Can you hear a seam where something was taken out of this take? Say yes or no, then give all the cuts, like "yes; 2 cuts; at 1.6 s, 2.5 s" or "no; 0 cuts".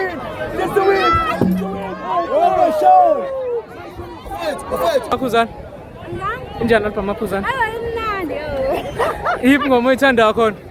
yes; 1 cut; at 5.1 s